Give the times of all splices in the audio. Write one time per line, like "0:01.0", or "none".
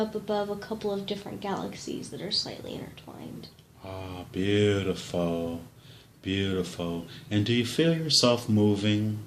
0:06.8